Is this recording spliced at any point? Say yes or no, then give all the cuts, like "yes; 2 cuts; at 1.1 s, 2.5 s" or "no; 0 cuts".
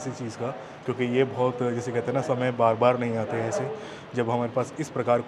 no; 0 cuts